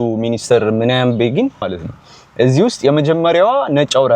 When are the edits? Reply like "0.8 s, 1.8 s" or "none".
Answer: 1.6 s